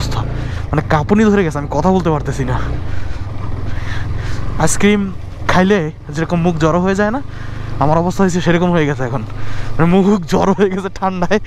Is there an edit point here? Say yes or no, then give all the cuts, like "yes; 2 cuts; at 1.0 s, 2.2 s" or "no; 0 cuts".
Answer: no; 0 cuts